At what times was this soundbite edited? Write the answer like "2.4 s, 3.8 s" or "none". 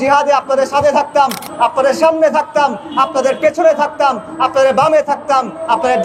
none